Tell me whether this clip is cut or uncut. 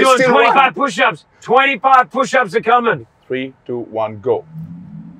cut